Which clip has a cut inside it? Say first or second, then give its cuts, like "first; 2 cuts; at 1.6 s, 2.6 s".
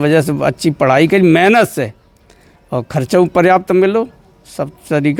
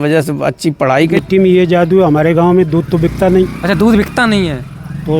second; 1 cut; at 1.1 s